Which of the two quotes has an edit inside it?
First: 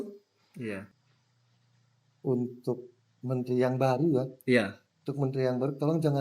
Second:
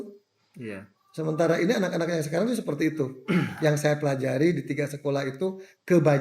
first; 1 cut; at 1.0 s

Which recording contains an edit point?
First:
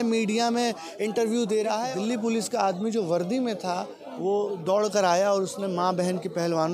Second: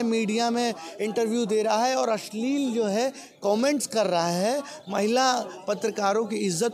first; 1 cut; at 1.9 s

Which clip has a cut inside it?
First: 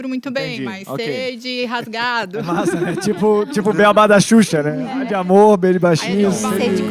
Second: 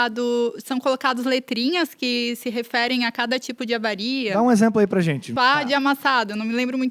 second; 1 cut; at 5.3 s

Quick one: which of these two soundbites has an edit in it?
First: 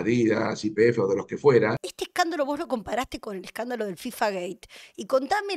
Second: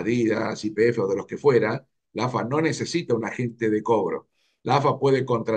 first; 1 cut; at 1.9 s

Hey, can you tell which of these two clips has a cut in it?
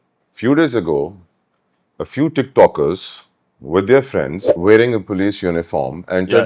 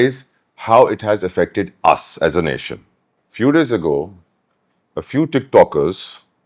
first; 1 cut; at 4.4 s

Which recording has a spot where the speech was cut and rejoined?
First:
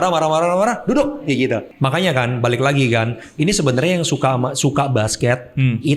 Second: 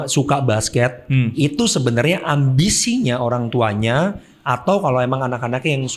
first; 1 cut; at 1.7 s

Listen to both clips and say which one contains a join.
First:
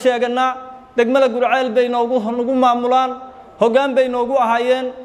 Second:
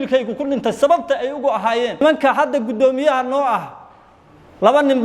second; 1 cut; at 2.0 s

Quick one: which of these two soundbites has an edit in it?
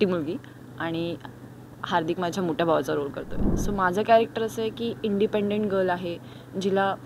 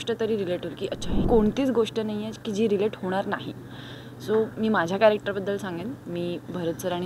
second; 1 cut; at 1.2 s

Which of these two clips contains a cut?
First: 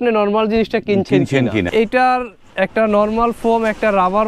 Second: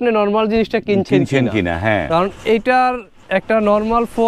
first; 1 cut; at 1.7 s

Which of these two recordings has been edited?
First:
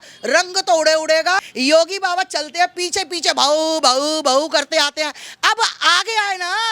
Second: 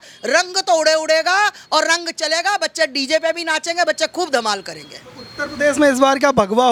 first; 1 cut; at 1.4 s

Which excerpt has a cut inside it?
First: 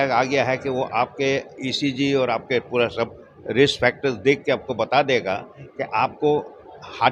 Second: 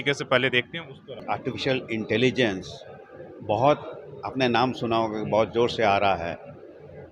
second; 1 cut; at 1.2 s

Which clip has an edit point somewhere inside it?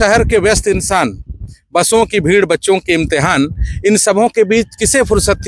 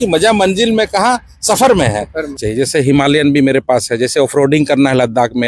second; 1 cut; at 2.3 s

